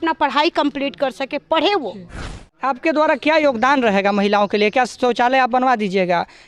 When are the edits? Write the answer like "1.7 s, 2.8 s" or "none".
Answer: 2.5 s